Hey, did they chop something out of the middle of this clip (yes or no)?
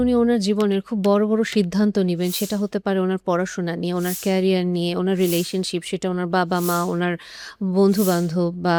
no